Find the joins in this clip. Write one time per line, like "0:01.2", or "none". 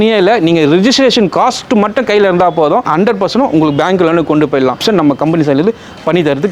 0:02.9
0:04.8